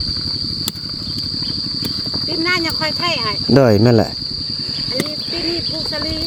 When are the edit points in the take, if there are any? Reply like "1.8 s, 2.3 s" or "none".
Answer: none